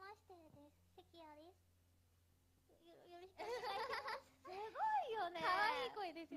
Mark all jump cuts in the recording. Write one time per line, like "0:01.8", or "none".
0:05.3